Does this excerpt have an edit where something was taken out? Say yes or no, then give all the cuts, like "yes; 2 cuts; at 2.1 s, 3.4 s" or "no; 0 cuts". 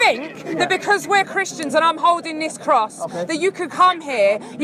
no; 0 cuts